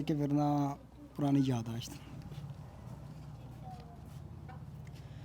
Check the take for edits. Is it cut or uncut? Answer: uncut